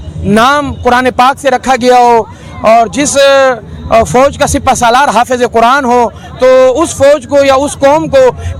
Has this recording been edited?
no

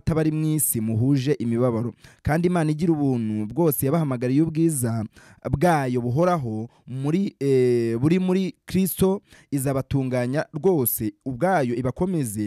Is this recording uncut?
yes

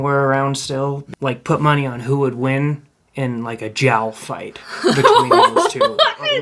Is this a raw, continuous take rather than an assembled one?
no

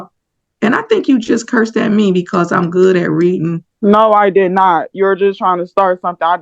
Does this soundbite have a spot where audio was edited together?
no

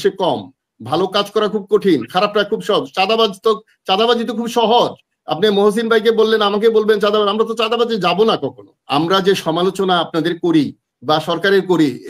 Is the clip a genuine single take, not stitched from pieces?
no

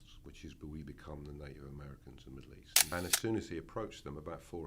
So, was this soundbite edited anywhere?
yes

